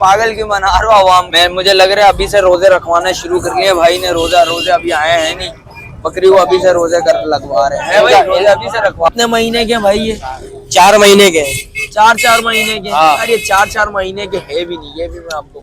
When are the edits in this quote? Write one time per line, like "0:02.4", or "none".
0:01.3
0:09.1

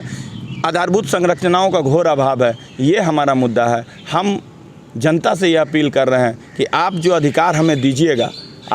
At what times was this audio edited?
none

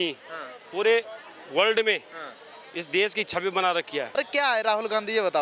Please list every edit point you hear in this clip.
0:04.1

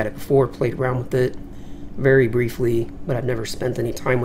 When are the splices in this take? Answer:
0:01.5

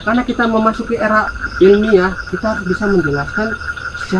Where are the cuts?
0:01.4

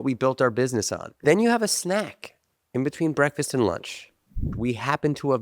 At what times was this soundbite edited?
0:01.0
0:04.5

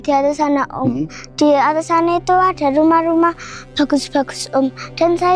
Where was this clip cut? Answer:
none

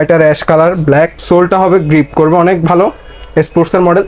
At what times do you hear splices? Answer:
0:01.2

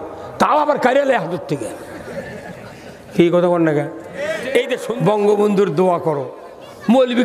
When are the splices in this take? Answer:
0:04.8

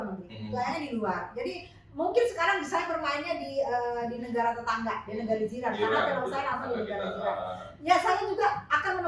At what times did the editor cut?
none

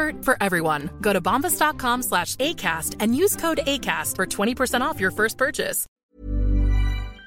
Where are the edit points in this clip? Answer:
0:06.0

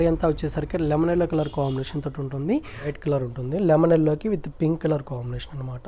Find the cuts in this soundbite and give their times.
0:02.9

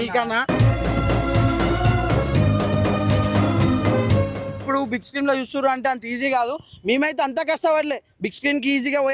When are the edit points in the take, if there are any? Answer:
0:04.6

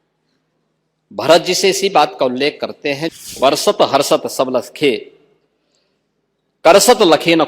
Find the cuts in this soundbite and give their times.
0:03.3

